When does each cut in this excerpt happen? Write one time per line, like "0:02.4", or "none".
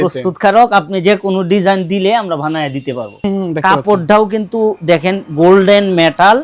0:03.2